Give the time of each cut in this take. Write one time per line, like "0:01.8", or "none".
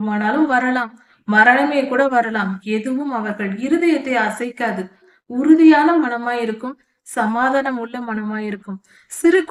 none